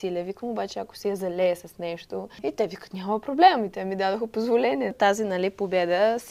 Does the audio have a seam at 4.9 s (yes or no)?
yes